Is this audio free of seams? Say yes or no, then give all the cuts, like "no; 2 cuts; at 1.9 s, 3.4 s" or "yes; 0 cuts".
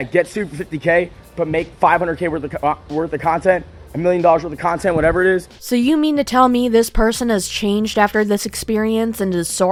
yes; 0 cuts